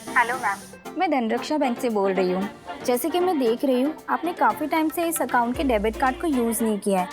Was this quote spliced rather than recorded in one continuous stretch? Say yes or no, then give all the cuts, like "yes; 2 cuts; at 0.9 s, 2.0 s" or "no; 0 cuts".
yes; 1 cut; at 2.7 s